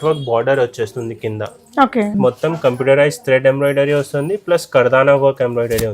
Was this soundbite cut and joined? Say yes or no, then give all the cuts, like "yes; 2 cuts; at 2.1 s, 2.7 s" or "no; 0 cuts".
yes; 1 cut; at 2.1 s